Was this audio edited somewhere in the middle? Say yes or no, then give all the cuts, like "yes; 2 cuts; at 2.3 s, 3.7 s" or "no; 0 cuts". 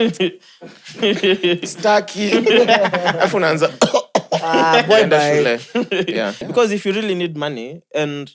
yes; 1 cut; at 6.4 s